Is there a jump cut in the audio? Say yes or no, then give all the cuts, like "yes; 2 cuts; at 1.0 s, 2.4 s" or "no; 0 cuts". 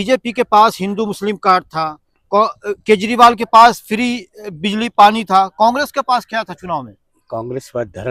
no; 0 cuts